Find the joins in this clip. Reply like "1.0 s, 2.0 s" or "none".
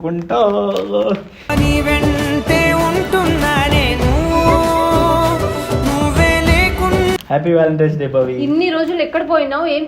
7.2 s